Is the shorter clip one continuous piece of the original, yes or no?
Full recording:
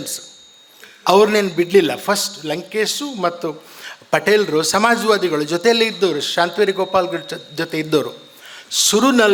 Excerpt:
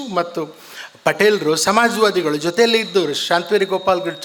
yes